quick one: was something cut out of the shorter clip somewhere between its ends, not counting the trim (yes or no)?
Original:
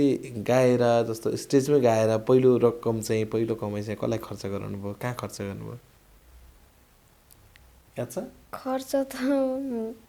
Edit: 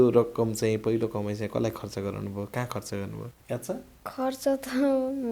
yes